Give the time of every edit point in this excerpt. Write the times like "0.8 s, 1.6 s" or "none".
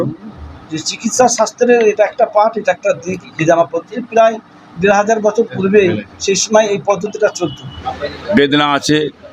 7.9 s